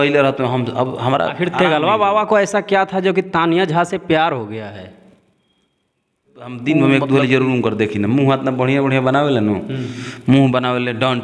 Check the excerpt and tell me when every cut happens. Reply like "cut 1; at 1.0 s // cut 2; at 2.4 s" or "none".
cut 1; at 1.4 s // cut 2; at 6.6 s